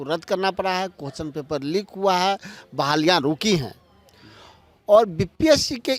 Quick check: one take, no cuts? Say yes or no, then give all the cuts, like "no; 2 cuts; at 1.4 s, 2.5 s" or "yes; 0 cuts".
yes; 0 cuts